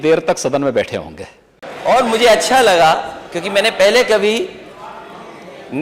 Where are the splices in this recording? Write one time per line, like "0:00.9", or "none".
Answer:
0:01.6

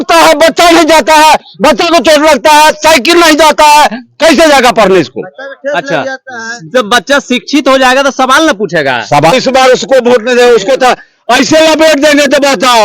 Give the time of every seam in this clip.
0:09.3

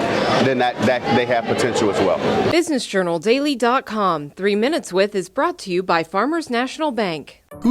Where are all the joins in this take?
0:02.5

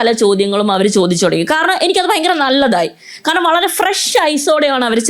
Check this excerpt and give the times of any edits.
none

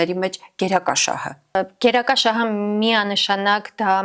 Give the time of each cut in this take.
0:01.6

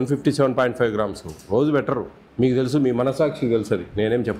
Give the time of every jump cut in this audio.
0:02.2

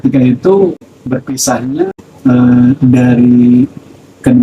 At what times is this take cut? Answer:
0:00.9
0:02.0

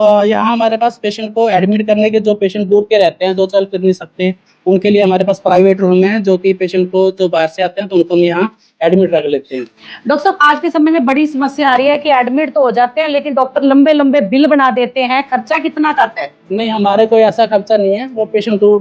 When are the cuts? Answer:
none

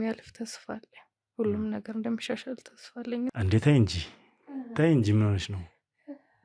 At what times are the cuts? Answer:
0:03.4

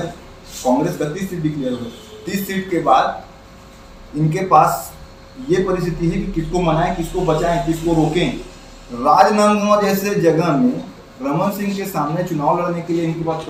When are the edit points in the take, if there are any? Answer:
none

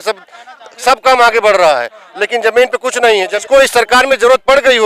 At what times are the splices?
0:03.3

